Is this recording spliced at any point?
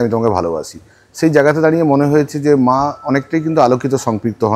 no; 0 cuts

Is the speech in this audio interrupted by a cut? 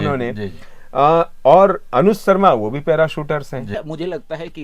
yes; 1 cut; at 3.7 s

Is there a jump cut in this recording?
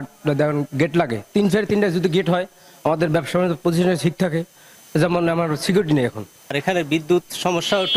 no; 0 cuts

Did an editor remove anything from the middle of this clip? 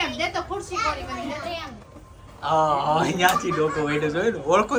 no; 0 cuts

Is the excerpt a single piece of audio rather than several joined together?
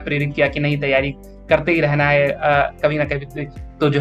yes; 0 cuts

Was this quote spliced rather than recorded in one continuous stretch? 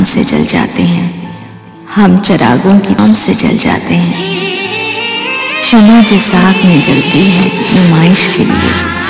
yes; 1 cut; at 3.0 s

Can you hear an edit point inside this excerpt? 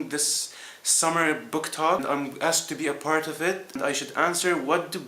yes; 2 cuts; at 2.0 s, 3.8 s

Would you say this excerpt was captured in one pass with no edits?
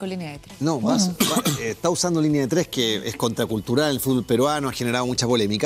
yes; 0 cuts

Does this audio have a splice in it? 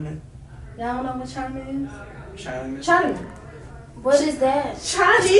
no; 0 cuts

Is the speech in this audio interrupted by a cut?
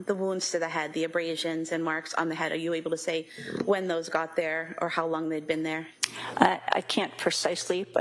no; 0 cuts

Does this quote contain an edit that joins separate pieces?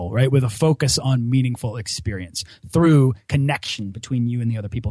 no; 0 cuts

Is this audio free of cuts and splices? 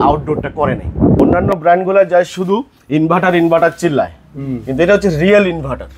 no; 1 cut; at 1.4 s

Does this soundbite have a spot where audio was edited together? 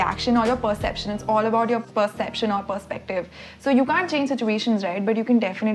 yes; 1 cut; at 1.8 s

